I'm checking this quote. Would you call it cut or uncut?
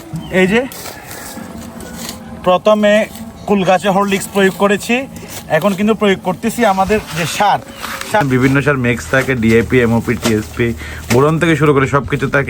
cut